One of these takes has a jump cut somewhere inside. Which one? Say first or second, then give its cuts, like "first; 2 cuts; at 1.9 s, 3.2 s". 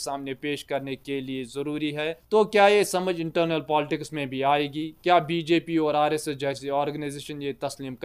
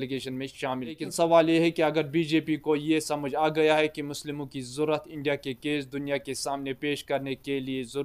second; 1 cut; at 1.1 s